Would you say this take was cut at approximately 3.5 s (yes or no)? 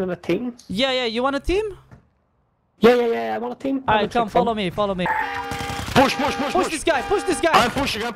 no